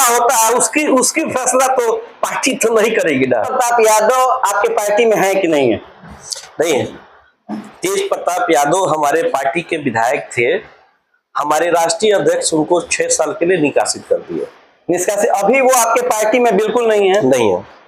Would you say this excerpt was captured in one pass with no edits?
yes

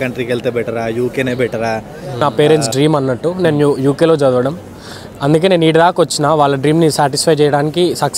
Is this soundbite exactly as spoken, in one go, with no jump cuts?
no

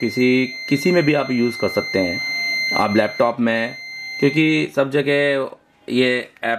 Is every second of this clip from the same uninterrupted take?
yes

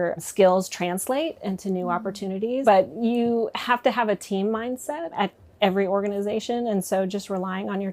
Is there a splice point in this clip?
yes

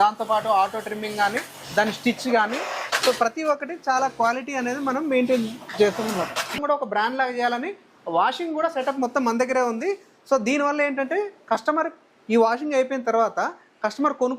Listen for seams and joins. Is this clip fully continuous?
no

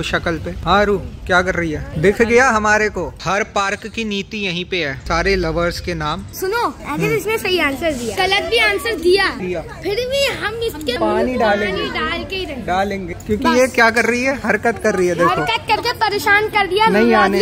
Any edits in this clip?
yes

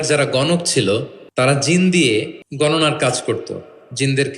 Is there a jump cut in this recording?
yes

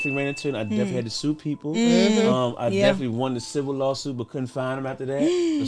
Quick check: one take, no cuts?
yes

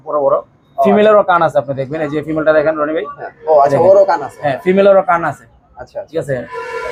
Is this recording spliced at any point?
no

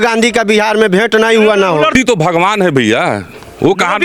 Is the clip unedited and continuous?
no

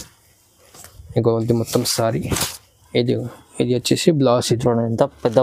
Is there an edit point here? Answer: no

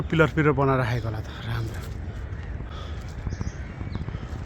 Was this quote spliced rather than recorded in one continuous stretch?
no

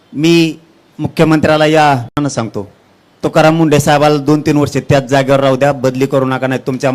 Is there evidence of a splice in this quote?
yes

